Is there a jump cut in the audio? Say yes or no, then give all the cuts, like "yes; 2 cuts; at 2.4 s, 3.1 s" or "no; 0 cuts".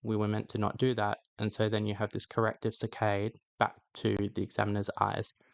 no; 0 cuts